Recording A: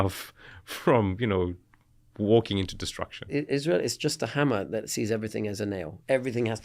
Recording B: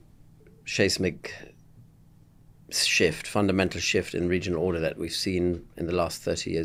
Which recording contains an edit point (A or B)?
A